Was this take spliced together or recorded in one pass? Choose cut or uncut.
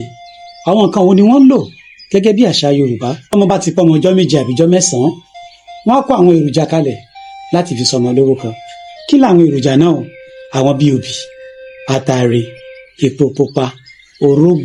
cut